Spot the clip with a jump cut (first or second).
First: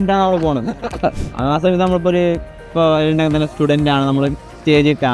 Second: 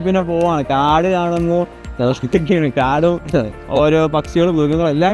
first